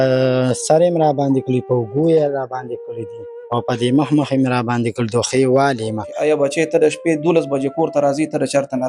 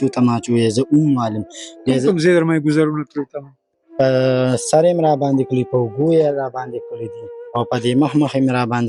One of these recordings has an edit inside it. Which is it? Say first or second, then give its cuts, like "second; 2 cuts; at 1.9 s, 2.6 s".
first; 1 cut; at 6.1 s